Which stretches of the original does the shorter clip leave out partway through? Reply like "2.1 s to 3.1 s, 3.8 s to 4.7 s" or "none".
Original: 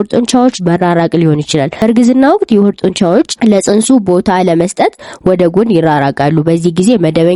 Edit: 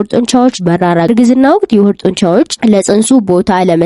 1.1 s to 1.9 s